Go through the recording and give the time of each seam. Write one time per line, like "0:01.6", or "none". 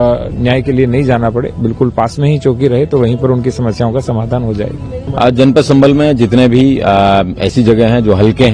none